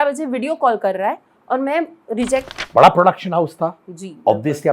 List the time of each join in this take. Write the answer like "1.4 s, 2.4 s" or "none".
2.5 s